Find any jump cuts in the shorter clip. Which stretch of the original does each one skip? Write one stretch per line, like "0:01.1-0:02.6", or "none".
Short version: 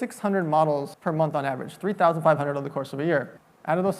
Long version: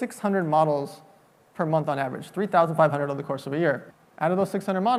0:00.9-0:01.5